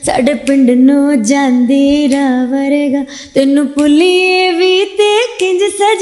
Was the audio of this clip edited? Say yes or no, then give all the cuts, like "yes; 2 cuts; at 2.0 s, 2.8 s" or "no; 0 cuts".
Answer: no; 0 cuts